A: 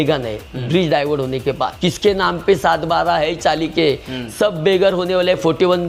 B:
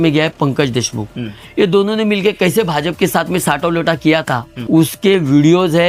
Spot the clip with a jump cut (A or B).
A